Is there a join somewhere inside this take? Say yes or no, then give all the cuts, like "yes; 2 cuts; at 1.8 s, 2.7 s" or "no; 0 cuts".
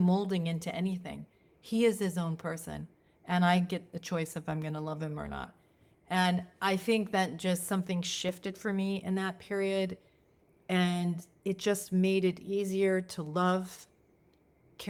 no; 0 cuts